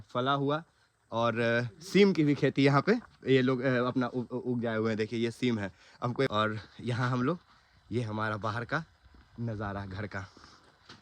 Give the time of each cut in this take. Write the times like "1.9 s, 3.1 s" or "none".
6.3 s